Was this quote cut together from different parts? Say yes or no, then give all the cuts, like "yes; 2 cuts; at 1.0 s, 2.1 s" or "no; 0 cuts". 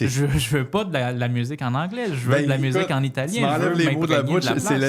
no; 0 cuts